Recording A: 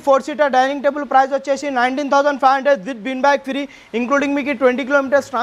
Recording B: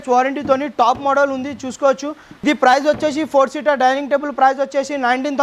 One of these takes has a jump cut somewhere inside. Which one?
B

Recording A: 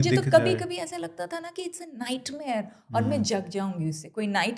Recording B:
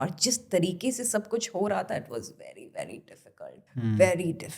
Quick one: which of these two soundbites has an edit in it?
B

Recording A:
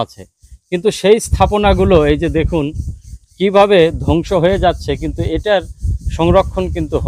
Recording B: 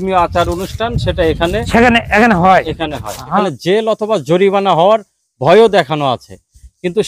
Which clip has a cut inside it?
B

